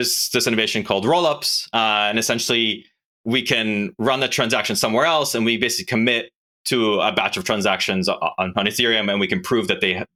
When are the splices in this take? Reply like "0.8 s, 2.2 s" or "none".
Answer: none